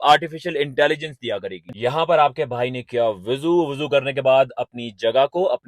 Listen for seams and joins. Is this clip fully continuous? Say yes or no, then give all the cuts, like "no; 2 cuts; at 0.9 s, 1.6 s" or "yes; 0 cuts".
no; 1 cut; at 1.8 s